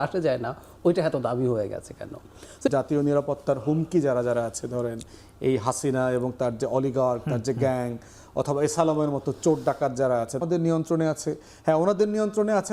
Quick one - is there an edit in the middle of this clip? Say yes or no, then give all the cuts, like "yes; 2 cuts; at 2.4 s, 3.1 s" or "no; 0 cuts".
yes; 2 cuts; at 2.7 s, 10.4 s